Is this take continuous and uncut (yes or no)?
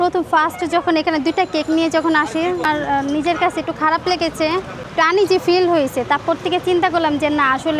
no